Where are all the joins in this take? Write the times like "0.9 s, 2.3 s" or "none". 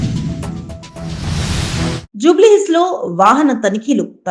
2.0 s